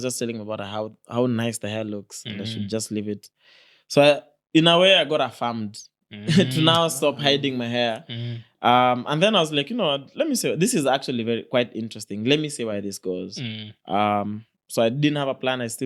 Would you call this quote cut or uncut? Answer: uncut